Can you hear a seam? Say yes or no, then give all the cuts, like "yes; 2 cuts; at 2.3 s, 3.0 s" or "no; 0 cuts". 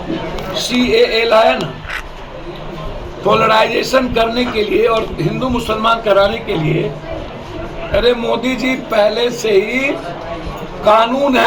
no; 0 cuts